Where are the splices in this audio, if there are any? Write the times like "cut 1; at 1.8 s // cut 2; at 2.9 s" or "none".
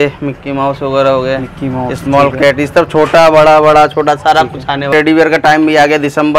cut 1; at 4.9 s

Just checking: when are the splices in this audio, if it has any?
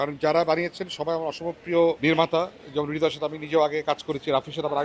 cut 1; at 2.0 s

